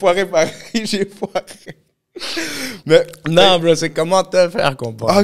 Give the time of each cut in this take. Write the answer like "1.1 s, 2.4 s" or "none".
none